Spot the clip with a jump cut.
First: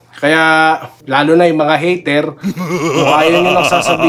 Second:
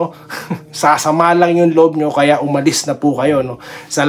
first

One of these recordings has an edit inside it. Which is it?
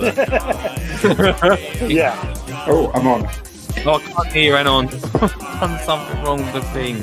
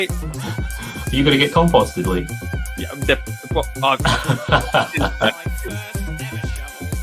second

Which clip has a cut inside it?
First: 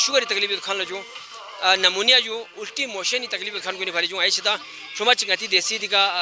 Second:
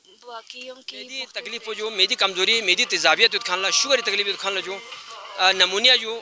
second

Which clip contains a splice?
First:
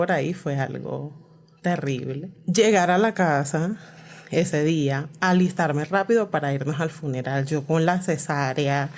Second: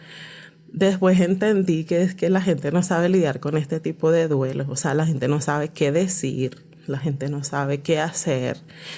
first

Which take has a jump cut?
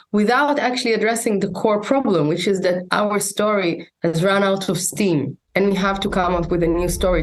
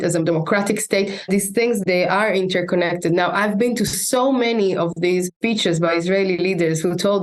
second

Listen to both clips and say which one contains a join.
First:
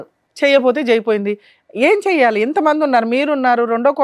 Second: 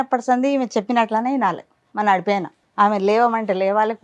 second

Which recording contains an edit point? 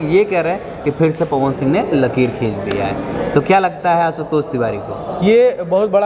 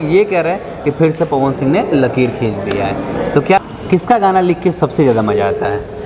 second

